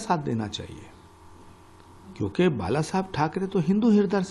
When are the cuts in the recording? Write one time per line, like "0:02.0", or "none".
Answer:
none